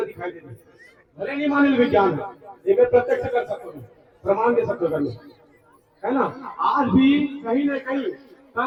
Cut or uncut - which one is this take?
uncut